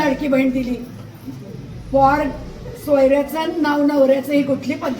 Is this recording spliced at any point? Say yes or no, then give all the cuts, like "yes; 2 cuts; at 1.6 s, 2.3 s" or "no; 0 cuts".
no; 0 cuts